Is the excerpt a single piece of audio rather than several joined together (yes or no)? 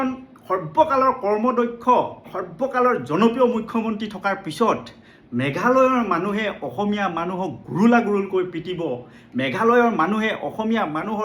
no